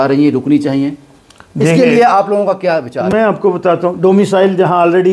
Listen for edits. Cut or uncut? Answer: uncut